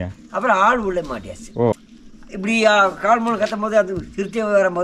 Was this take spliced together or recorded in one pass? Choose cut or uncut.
cut